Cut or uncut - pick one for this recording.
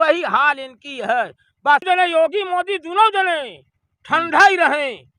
cut